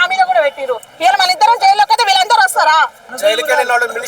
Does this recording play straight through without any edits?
no; 1 cut; at 3.0 s

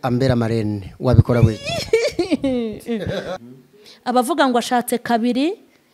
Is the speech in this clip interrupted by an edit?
yes; 1 cut; at 3.4 s

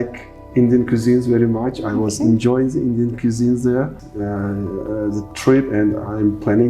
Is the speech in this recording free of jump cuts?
no; 1 cut; at 4.0 s

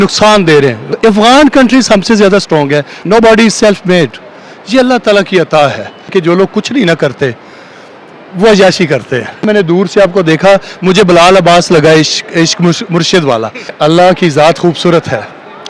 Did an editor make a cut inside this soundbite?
yes; 5 cuts; at 0.9 s, 2.9 s, 6.1 s, 9.4 s, 13.7 s

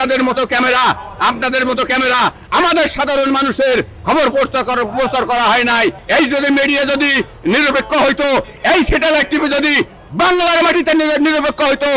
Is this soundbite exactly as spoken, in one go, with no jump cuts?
yes; 0 cuts

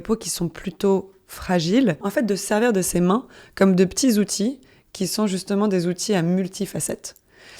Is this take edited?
yes; 1 cut; at 2.0 s

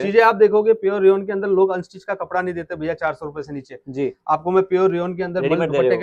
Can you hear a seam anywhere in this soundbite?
no; 0 cuts

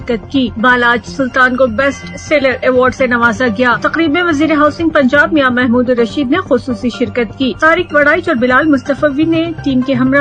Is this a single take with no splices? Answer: yes; 0 cuts

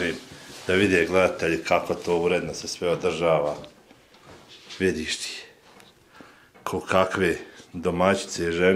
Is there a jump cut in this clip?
no; 0 cuts

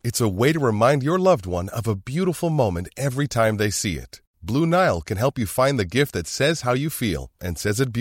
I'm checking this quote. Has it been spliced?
no; 0 cuts

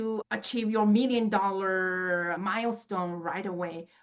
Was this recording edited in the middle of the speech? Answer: no; 0 cuts

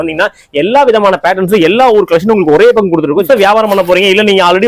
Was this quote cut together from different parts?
yes; 1 cut; at 3.2 s

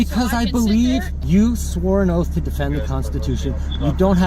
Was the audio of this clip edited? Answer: yes; 1 cut; at 1.1 s

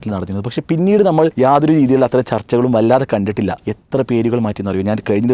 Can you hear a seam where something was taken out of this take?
yes; 2 cuts; at 1.3 s, 3.7 s

